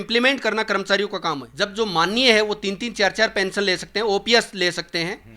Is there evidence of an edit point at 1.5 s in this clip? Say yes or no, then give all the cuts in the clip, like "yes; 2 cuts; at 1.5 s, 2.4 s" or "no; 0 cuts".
yes; 1 cut; at 1.5 s